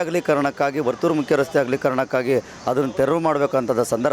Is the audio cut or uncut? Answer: uncut